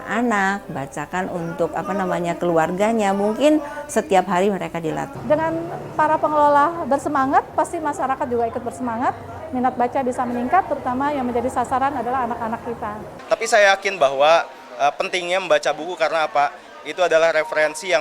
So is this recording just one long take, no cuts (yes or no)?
no